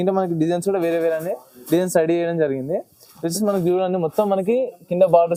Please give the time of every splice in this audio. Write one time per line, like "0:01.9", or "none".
none